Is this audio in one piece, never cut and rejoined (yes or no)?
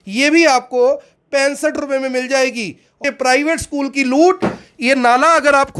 no